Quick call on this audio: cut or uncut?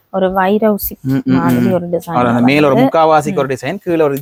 uncut